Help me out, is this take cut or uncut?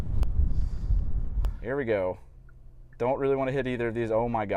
cut